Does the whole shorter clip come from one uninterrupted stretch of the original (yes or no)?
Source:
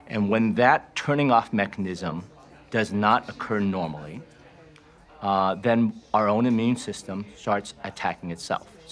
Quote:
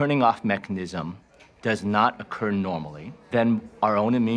no